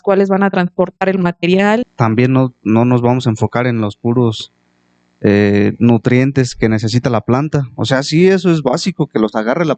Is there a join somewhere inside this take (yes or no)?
yes